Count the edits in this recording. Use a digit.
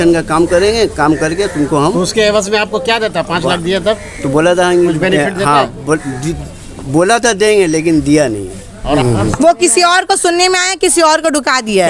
1